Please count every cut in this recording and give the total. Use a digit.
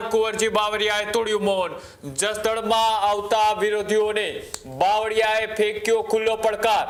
0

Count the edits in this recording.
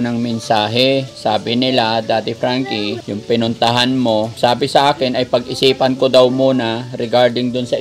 3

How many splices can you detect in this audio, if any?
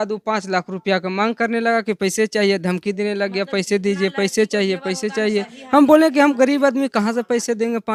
0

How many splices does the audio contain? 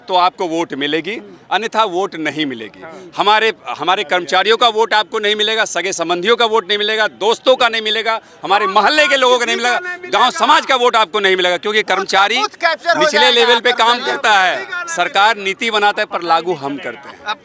0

